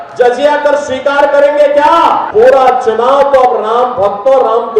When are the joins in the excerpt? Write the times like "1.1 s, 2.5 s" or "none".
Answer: 2.2 s